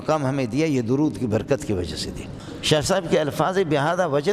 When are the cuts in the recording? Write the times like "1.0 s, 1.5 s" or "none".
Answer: 2.9 s